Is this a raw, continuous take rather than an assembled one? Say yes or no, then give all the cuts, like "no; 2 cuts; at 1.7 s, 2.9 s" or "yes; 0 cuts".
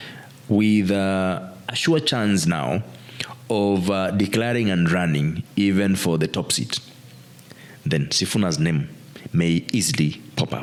yes; 0 cuts